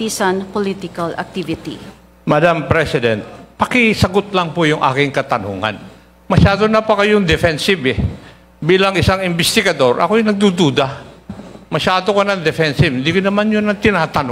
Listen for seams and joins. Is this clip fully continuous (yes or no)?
yes